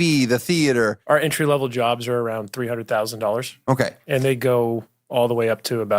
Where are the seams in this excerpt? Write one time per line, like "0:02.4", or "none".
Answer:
0:01.0